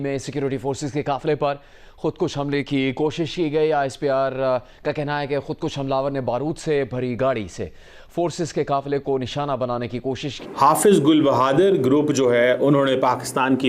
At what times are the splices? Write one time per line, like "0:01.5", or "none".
0:10.3

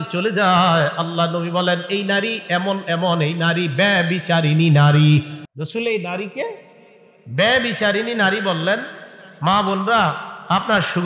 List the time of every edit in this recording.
0:05.4

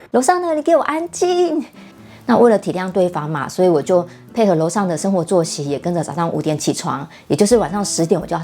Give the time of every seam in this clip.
0:01.8

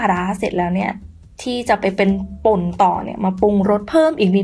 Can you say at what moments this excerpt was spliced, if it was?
none

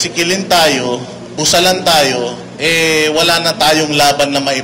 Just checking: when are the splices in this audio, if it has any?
0:02.5

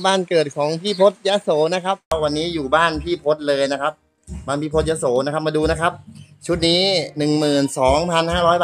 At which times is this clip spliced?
0:02.1

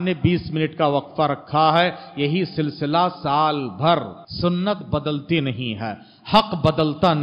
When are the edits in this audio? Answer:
0:04.2

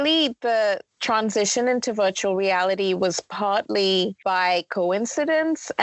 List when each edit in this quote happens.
0:04.2

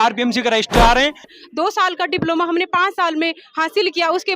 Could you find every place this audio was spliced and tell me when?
0:01.3

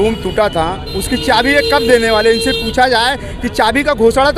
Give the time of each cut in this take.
none

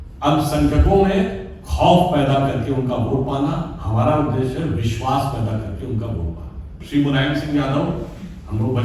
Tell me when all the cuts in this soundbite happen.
0:06.8

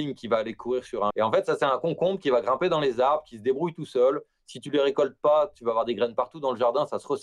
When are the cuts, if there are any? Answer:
0:01.1

